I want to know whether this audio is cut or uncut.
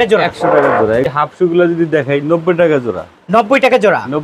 cut